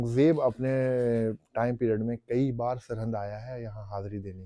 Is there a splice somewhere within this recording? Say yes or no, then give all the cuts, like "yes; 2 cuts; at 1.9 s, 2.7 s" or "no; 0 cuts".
no; 0 cuts